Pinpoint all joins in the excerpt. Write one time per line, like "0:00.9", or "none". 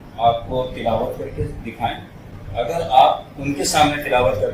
0:02.3